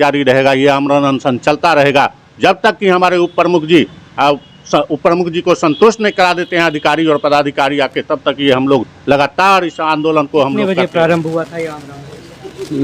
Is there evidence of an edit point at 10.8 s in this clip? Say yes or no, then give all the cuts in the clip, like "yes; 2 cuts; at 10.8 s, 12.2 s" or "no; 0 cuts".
yes; 1 cut; at 10.8 s